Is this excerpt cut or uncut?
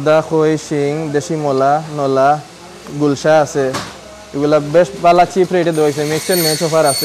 uncut